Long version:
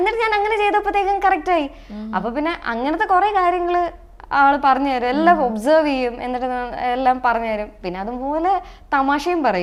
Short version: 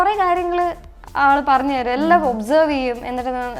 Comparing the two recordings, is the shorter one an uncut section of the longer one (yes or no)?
yes